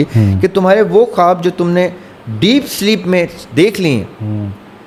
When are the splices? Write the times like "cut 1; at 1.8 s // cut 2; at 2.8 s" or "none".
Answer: none